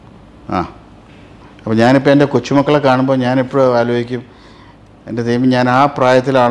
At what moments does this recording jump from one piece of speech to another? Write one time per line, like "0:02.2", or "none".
none